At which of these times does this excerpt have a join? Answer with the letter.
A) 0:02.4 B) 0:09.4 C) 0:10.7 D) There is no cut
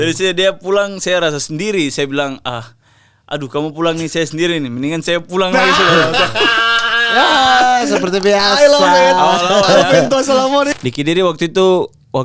C